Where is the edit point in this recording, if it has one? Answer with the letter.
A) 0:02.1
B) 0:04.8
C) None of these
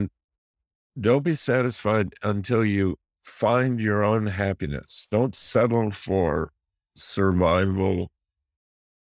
C